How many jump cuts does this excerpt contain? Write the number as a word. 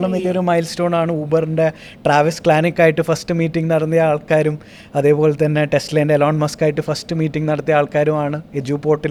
zero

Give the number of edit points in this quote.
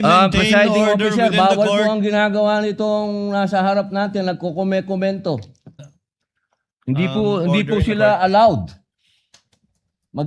one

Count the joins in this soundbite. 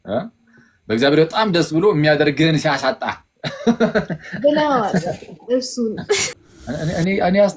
one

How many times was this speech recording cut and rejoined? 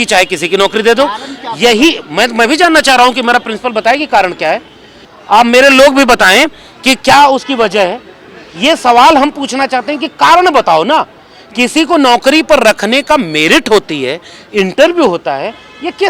zero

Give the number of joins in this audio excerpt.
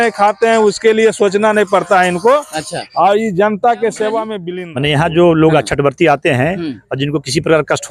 one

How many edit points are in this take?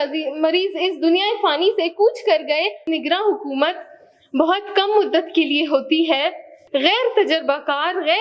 two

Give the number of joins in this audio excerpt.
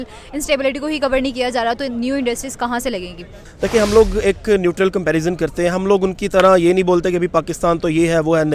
one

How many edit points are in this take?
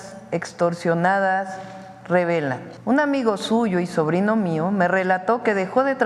one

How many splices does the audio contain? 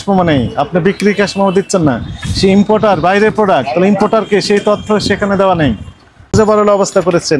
one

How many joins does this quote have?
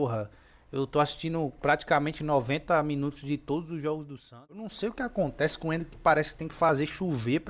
one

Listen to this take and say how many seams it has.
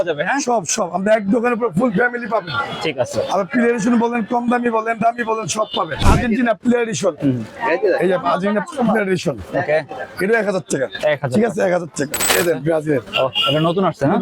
two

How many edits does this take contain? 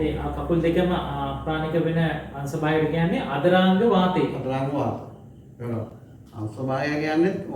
zero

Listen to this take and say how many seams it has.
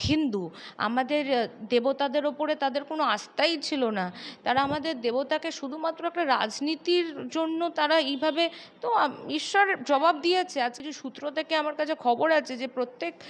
one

